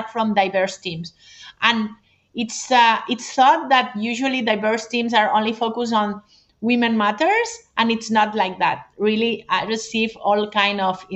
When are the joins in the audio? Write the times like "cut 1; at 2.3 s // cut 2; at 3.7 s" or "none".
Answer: none